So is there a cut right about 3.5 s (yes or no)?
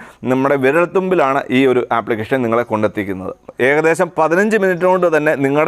yes